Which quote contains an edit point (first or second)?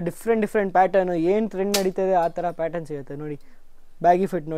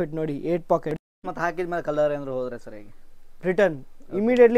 second